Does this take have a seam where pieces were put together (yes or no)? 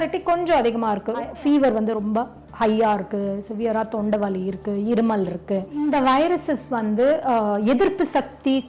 yes